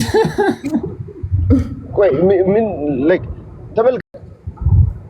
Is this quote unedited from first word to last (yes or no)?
yes